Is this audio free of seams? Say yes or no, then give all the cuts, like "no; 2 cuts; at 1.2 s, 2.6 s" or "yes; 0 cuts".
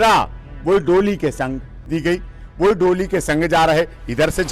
no; 1 cut; at 1.9 s